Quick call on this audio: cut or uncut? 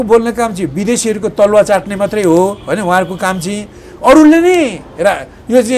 uncut